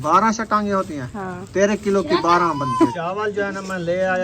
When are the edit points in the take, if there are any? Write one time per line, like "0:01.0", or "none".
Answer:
0:02.9